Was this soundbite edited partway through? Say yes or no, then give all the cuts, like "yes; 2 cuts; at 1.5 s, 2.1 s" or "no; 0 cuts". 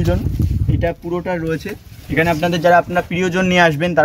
no; 0 cuts